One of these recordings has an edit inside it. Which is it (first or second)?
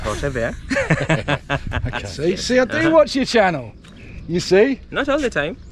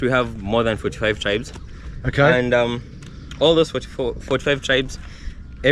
first